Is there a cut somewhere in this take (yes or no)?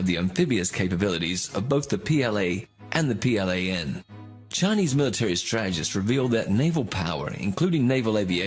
yes